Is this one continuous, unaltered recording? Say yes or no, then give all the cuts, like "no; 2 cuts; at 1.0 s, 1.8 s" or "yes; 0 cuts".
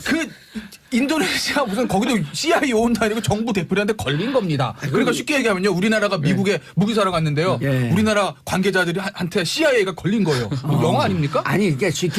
no; 1 cut; at 10.1 s